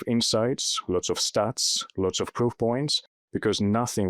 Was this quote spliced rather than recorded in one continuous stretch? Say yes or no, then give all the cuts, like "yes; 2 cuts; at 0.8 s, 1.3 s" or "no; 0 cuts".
no; 0 cuts